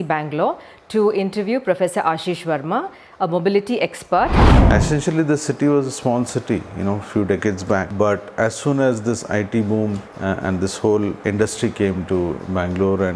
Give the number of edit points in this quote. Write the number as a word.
four